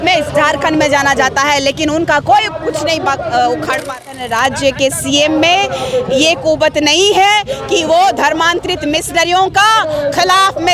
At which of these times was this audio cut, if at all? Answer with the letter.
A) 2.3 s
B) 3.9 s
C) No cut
B